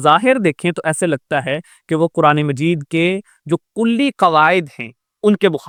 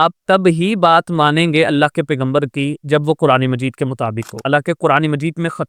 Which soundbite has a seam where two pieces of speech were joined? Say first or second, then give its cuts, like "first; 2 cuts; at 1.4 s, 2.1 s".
second; 1 cut; at 4.3 s